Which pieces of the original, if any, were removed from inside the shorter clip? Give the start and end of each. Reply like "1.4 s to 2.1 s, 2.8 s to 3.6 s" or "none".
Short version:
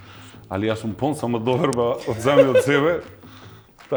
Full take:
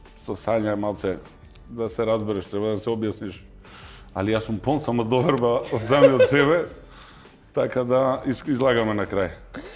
none